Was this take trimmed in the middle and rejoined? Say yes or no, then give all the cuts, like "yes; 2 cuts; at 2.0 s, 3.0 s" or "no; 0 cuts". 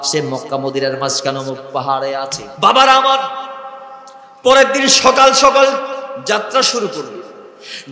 yes; 1 cut; at 2.4 s